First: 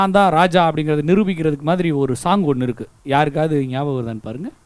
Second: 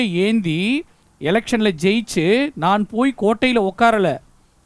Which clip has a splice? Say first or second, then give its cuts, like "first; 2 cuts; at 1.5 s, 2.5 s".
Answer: first; 1 cut; at 2.9 s